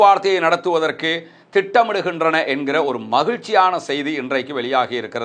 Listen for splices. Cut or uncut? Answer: uncut